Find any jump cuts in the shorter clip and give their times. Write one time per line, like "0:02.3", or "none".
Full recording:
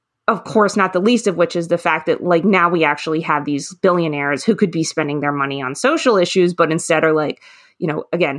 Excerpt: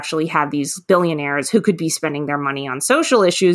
none